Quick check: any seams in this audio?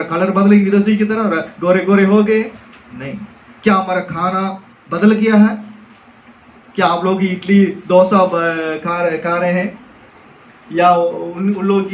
no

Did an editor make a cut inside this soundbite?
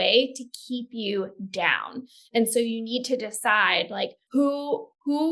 yes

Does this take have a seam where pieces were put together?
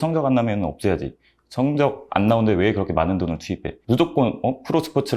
yes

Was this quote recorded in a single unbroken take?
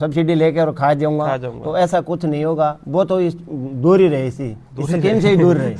yes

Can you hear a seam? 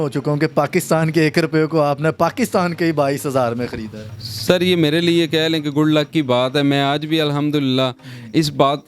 no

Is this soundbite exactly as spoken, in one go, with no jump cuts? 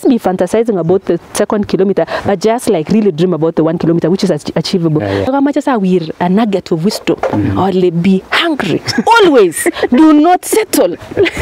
no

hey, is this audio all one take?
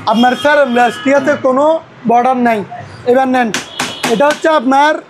no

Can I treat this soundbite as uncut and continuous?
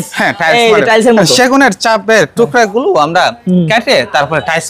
yes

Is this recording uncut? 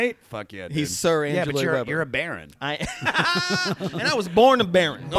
yes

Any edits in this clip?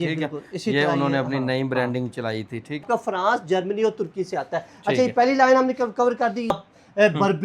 yes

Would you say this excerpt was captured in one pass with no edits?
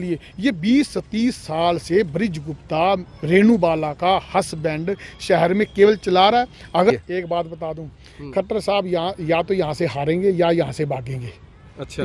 no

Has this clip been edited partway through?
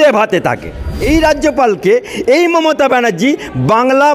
yes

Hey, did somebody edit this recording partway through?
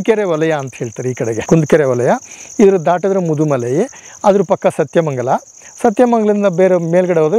yes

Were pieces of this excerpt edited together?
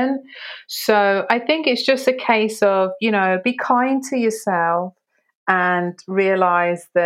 no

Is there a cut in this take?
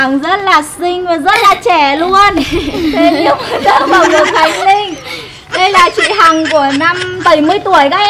yes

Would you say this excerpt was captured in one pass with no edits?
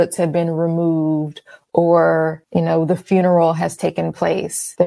yes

